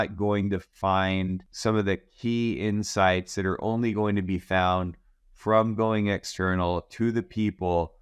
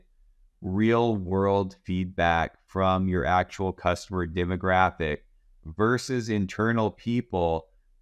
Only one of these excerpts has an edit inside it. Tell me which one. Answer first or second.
first